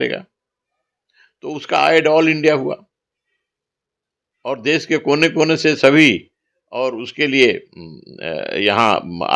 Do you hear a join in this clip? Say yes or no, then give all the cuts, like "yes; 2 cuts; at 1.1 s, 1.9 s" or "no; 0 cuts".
no; 0 cuts